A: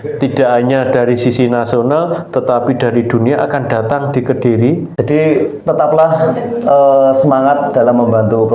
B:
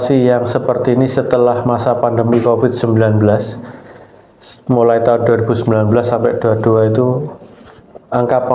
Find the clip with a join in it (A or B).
A